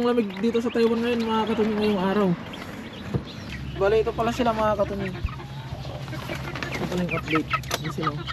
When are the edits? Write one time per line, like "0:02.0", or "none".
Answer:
0:03.3